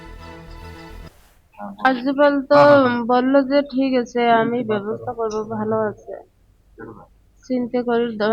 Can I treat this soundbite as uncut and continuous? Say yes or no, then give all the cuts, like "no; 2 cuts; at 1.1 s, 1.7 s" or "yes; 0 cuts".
no; 1 cut; at 0.9 s